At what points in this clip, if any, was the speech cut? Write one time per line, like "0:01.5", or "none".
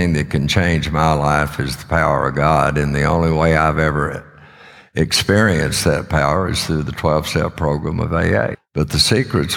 0:08.6